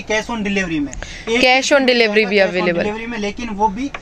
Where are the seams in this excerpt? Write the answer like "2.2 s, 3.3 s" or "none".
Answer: none